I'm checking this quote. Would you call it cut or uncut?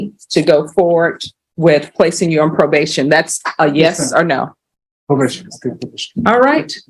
uncut